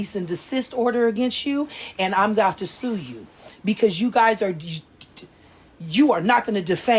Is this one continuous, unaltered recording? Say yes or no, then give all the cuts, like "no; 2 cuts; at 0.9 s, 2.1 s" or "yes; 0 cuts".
yes; 0 cuts